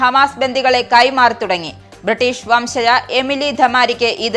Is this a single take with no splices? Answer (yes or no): yes